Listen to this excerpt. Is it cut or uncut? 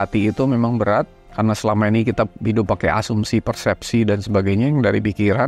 cut